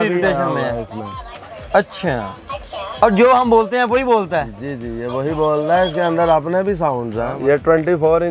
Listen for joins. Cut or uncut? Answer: cut